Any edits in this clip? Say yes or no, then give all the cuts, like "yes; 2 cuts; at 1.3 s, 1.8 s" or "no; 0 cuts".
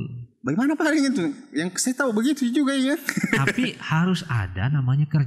no; 0 cuts